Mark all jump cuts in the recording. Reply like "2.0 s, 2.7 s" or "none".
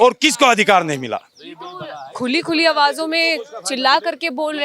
none